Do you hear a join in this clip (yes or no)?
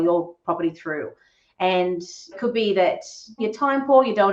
yes